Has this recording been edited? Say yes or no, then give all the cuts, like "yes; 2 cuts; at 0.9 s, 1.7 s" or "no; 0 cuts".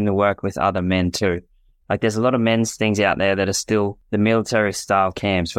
yes; 2 cuts; at 1.7 s, 4.0 s